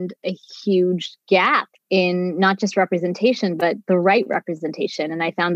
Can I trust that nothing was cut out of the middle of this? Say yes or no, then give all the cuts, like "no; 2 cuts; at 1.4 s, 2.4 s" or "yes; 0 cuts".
no; 1 cut; at 1.7 s